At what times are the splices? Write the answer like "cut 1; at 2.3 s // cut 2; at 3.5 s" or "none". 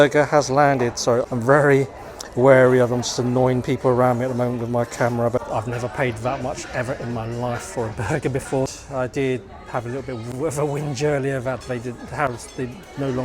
cut 1; at 1.3 s // cut 2; at 5.4 s // cut 3; at 8.7 s